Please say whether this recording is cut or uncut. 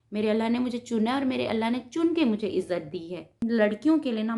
cut